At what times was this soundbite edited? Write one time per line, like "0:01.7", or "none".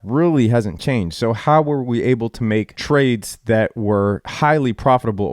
0:02.8
0:04.3